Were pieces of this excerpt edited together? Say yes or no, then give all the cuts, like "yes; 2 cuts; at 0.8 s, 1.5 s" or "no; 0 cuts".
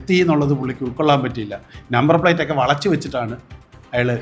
no; 0 cuts